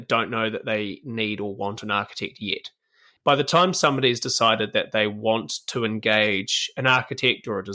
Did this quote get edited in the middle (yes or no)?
yes